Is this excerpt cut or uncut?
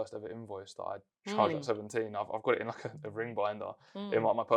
uncut